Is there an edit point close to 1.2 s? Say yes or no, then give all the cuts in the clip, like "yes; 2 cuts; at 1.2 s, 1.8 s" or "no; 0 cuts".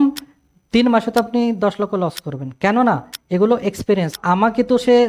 no; 1 cut; at 4.1 s